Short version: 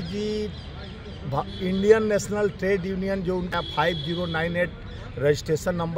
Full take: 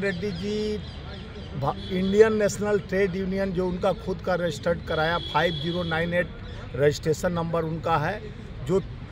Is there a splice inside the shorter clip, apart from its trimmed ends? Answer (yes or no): yes